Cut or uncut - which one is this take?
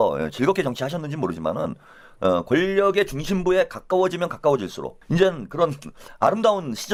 uncut